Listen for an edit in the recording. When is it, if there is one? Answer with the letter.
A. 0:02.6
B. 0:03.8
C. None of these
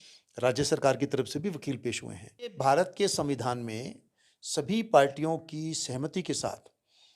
A